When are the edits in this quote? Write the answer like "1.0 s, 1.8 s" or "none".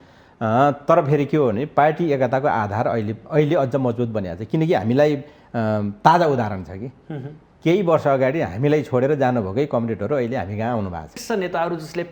11.2 s